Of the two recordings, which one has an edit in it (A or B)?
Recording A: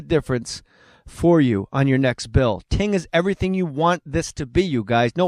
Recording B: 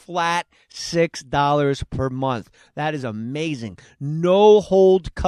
A